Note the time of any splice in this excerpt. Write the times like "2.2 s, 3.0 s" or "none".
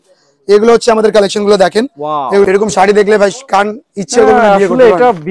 2.5 s